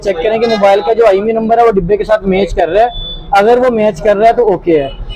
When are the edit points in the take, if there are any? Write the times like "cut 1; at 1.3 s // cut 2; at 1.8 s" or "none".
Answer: none